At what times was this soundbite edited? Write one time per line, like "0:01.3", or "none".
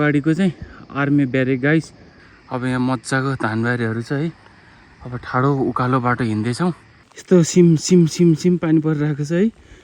0:06.9